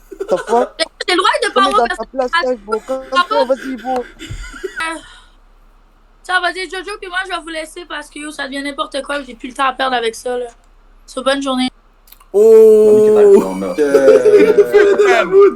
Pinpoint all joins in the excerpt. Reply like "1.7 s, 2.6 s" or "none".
4.8 s